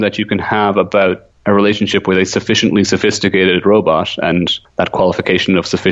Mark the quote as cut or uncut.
cut